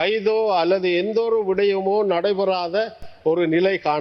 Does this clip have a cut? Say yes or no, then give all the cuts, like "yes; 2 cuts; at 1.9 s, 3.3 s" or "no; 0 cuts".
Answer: no; 0 cuts